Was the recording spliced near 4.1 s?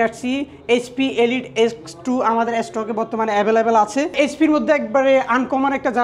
yes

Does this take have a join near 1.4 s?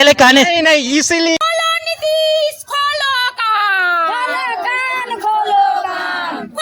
yes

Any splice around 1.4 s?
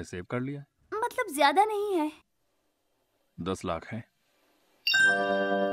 no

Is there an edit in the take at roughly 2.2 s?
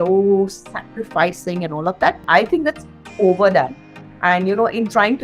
yes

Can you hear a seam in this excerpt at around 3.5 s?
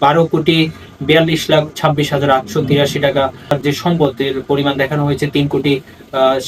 yes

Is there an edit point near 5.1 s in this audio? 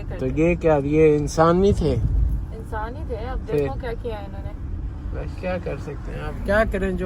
no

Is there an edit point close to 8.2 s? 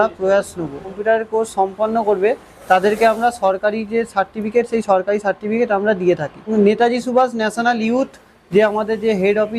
no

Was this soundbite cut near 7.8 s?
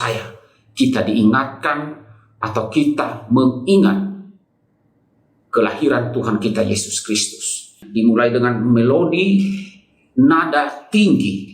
yes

